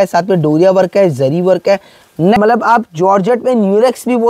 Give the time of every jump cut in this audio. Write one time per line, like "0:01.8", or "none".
0:02.4